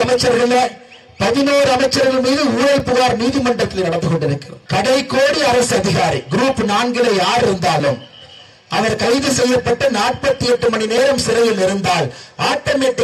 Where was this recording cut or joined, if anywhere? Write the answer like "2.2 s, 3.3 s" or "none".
4.5 s